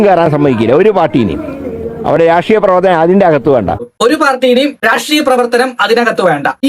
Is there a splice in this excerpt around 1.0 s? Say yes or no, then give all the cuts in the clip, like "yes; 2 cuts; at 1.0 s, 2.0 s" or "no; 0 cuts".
no; 1 cut; at 3.9 s